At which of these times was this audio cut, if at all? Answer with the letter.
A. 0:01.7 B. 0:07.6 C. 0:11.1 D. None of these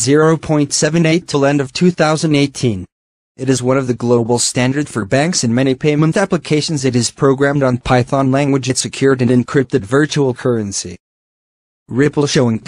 A